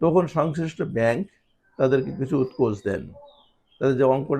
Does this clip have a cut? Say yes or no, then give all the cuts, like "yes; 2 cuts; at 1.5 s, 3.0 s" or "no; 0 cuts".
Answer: no; 0 cuts